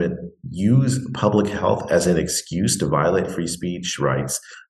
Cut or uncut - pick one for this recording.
uncut